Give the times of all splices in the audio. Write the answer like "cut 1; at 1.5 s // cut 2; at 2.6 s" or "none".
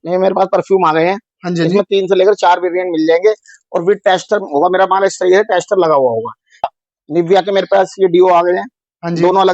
cut 1; at 6.6 s

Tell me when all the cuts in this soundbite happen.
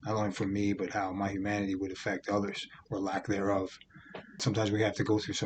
cut 1; at 4.4 s

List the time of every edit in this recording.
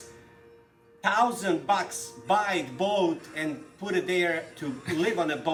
none

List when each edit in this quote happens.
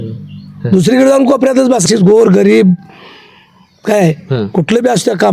cut 1; at 1.9 s

